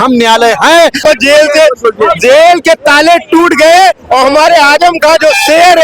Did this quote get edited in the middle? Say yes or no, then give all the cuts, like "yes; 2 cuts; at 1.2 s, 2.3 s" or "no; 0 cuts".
yes; 1 cut; at 0.9 s